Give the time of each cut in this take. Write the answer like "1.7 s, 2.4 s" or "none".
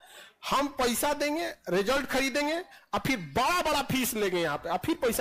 none